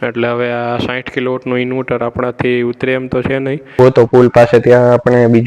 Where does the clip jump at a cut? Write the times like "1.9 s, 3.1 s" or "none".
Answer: 3.7 s